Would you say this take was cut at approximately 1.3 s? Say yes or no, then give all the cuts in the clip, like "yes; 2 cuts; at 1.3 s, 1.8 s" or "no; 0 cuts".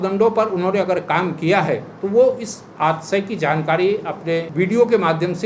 no; 1 cut; at 4.5 s